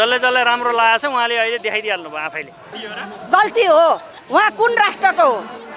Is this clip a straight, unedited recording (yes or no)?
no